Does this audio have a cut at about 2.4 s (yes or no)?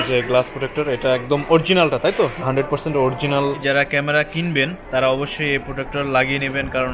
yes